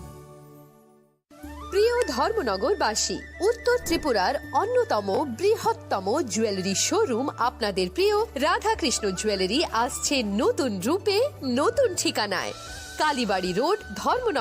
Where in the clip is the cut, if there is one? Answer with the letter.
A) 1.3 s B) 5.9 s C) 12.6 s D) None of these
A